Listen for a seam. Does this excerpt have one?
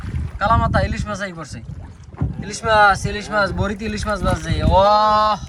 no; 0 cuts

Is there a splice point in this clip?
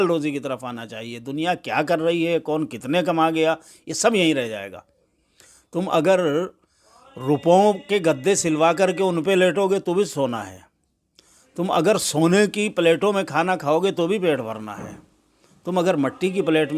no; 0 cuts

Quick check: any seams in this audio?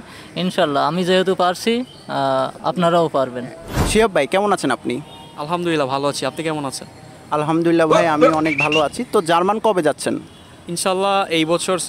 no; 0 cuts

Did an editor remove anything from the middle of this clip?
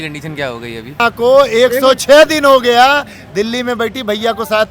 yes; 1 cut; at 1.0 s

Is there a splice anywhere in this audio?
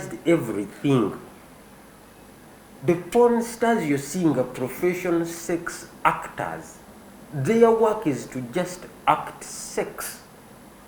no; 0 cuts

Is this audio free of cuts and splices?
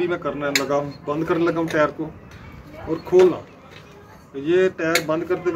yes; 0 cuts

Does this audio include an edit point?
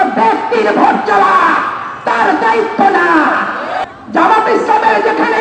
yes; 1 cut; at 3.8 s

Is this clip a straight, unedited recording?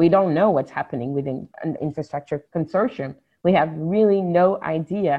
no; 1 cut; at 1.9 s

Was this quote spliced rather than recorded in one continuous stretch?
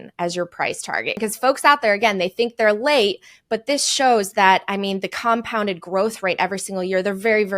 yes; 1 cut; at 1.2 s

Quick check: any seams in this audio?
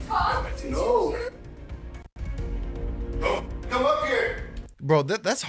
no; 0 cuts

